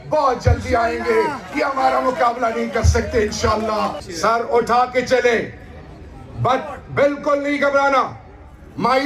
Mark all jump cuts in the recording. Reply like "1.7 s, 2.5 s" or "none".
4.1 s